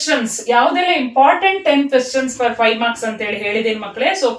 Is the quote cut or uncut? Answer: uncut